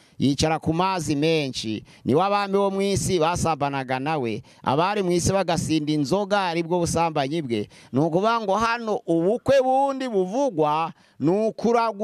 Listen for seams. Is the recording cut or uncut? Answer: uncut